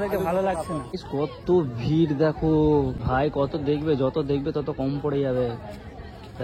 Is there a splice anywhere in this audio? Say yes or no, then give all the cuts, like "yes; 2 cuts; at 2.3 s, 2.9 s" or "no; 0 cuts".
yes; 2 cuts; at 1.0 s, 3.0 s